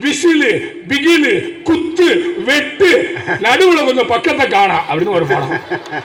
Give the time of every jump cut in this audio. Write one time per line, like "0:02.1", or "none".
none